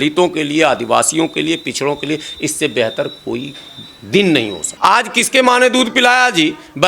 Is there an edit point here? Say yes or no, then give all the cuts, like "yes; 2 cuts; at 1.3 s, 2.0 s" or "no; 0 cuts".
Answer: yes; 1 cut; at 4.7 s